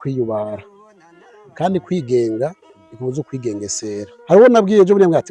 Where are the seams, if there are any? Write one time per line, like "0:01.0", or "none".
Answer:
0:04.1